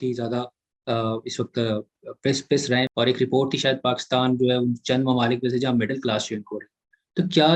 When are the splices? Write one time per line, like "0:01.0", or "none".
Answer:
0:02.9